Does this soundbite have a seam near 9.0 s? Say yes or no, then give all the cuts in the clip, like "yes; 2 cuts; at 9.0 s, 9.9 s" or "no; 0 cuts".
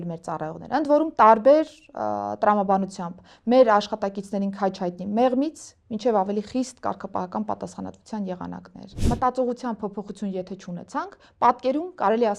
yes; 1 cut; at 9.0 s